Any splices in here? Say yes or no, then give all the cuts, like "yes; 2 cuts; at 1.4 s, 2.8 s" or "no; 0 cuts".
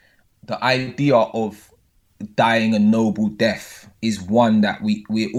no; 0 cuts